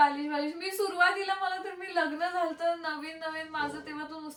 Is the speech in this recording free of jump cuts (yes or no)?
yes